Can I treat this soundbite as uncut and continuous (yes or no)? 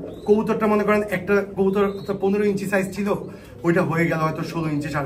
yes